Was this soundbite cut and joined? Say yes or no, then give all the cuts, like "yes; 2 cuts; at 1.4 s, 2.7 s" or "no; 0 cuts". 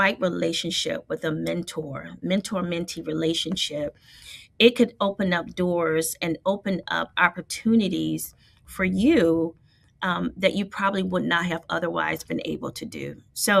no; 0 cuts